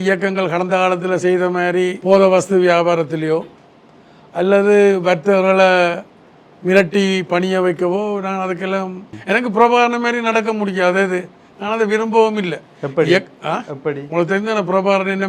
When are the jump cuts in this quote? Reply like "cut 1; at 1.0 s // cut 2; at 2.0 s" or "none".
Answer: cut 1; at 2.0 s // cut 2; at 9.1 s